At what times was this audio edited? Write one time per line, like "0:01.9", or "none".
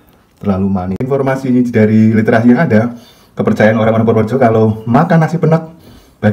0:01.1